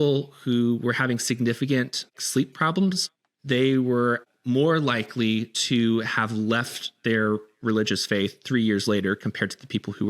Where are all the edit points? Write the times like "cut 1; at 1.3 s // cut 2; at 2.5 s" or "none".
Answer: cut 1; at 2.2 s